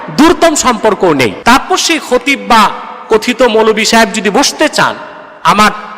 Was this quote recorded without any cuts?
no; 1 cut; at 1.4 s

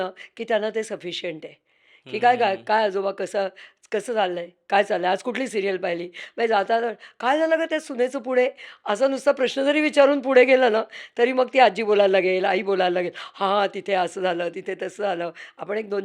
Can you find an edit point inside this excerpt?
no; 0 cuts

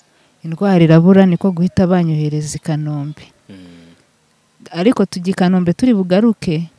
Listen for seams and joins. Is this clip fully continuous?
yes; 0 cuts

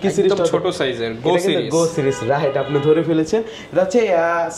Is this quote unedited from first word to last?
yes; 0 cuts

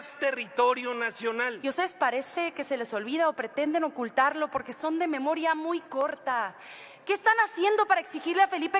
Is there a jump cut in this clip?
yes; 1 cut; at 1.6 s

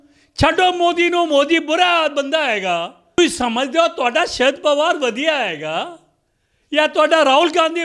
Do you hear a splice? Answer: yes; 1 cut; at 3.2 s

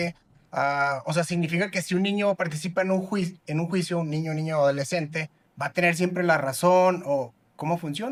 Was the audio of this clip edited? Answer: no; 0 cuts

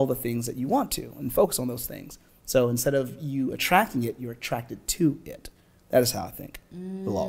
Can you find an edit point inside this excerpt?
no; 0 cuts

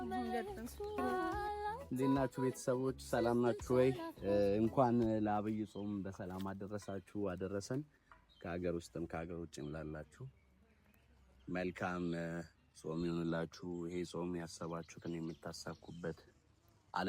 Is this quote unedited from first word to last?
no; 1 cut; at 1.0 s

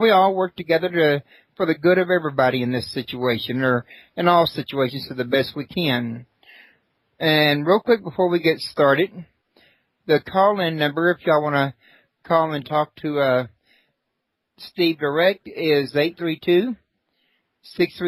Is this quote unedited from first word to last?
yes; 0 cuts

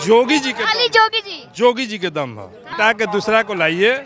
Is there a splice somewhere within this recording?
yes; 1 cut; at 2.7 s

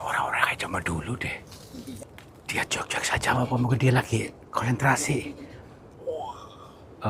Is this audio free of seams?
no; 1 cut; at 2.0 s

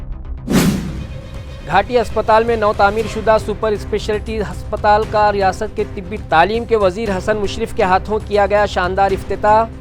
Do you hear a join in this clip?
yes; 1 cut; at 1.1 s

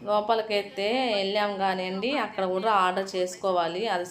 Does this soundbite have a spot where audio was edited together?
no; 0 cuts

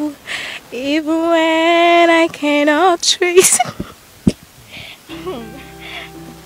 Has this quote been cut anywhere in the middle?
no; 0 cuts

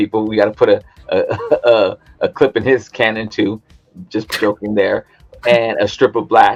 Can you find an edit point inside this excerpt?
no; 0 cuts

